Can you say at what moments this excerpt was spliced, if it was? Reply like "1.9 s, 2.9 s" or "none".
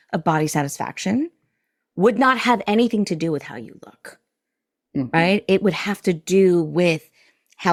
none